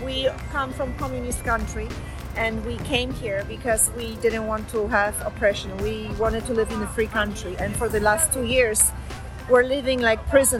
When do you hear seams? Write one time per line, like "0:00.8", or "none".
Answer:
none

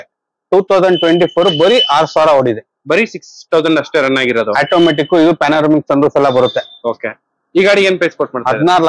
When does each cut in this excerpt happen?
none

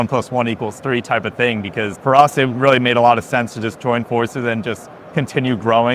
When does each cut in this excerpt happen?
0:01.9

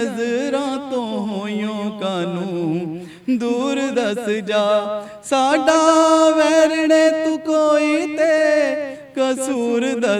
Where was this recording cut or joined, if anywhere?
none

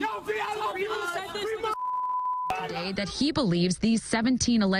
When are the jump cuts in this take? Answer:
0:02.9

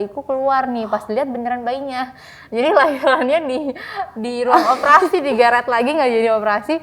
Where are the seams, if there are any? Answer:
none

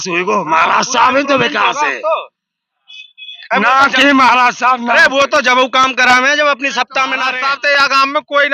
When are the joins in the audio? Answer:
0:07.4

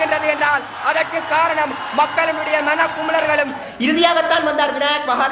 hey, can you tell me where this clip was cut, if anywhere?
0:03.6

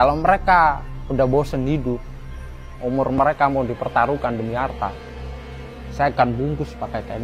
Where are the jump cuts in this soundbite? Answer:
none

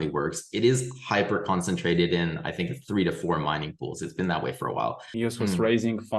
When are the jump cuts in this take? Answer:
0:05.1

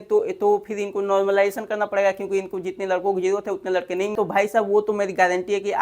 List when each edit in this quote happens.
0:04.1

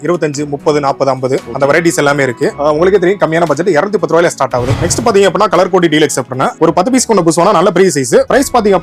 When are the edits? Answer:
none

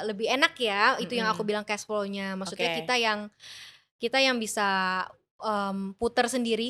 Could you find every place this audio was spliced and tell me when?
none

